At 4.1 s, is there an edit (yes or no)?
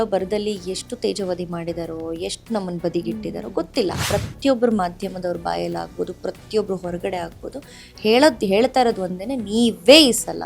yes